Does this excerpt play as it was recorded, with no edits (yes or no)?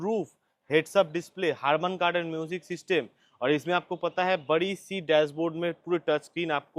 yes